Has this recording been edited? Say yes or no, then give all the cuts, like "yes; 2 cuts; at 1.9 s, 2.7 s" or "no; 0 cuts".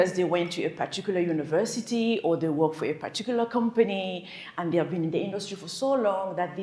no; 0 cuts